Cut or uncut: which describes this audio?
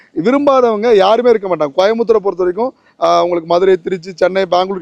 uncut